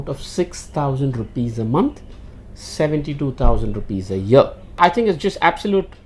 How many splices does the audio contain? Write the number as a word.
one